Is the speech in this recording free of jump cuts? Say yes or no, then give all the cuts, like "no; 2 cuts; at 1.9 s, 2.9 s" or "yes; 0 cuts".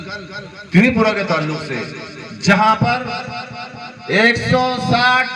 yes; 0 cuts